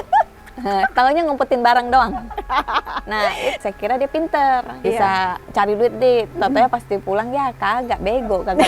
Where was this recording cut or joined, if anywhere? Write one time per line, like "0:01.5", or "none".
0:03.6
0:05.3